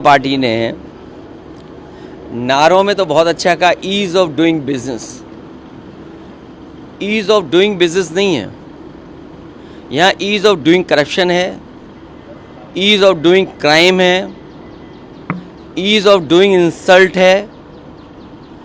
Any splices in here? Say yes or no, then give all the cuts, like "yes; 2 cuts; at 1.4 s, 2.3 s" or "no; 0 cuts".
no; 0 cuts